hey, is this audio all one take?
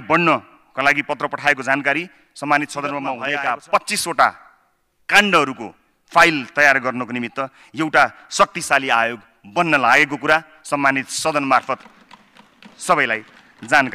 no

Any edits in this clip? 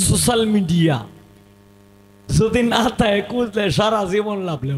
no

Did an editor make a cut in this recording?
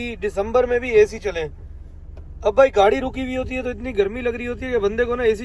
no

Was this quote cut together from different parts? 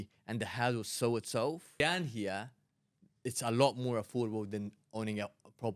yes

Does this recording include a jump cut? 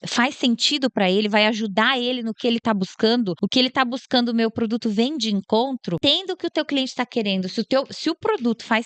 yes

